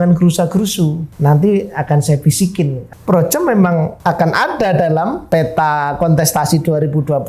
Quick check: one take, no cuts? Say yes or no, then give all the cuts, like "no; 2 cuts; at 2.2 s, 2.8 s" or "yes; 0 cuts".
no; 4 cuts; at 1.1 s, 2.9 s, 3.9 s, 5.2 s